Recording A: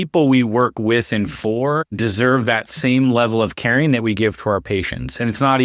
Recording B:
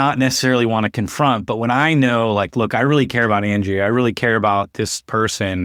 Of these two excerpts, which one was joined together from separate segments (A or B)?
A